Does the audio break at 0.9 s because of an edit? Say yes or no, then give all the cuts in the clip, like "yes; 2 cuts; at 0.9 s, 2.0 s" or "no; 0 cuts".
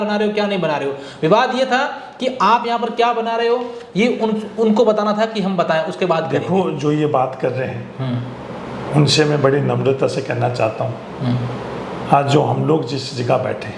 no; 0 cuts